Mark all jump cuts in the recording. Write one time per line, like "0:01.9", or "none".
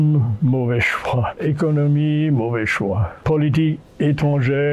0:01.4
0:03.2